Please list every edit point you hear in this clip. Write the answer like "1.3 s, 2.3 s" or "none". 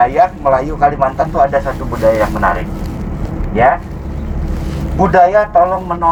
none